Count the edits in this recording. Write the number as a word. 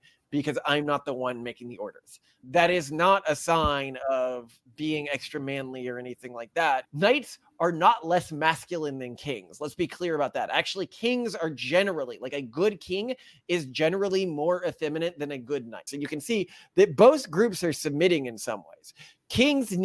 two